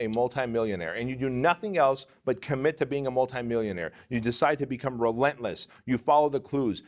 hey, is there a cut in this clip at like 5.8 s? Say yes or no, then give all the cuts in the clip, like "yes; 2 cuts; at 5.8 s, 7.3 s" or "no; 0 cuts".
no; 0 cuts